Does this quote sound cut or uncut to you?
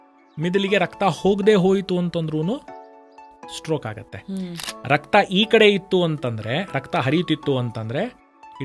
cut